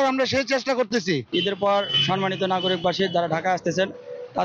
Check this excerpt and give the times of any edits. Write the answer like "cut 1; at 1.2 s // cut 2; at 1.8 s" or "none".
cut 1; at 1.3 s